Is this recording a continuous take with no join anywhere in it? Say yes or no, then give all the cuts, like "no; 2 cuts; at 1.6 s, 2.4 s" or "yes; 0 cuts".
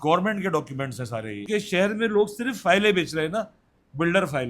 no; 1 cut; at 1.3 s